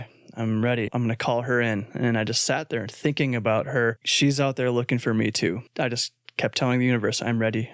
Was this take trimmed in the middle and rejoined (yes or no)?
yes